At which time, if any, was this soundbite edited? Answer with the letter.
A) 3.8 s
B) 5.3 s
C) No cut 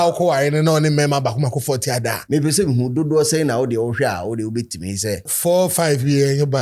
B